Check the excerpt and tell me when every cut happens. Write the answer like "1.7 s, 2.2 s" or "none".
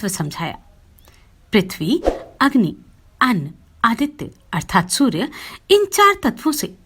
none